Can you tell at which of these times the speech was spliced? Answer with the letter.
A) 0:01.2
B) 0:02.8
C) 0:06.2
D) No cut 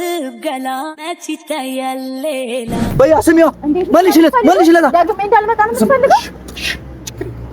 B